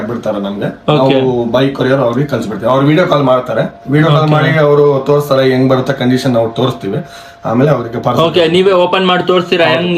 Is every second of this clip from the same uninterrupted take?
yes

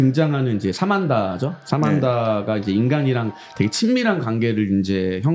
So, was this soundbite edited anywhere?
no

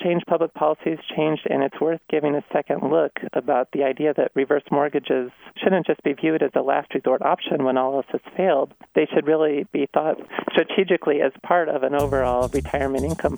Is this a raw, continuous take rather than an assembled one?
no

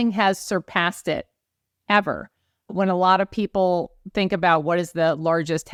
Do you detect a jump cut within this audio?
no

